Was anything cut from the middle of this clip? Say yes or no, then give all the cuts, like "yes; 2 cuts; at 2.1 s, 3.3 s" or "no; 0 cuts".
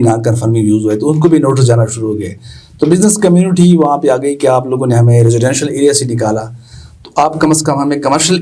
no; 0 cuts